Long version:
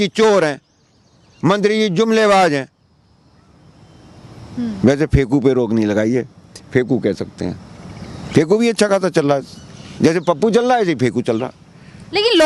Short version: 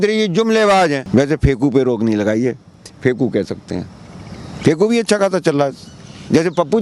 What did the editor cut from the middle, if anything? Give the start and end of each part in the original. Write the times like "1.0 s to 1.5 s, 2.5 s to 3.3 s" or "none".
2.7 s to 4.7 s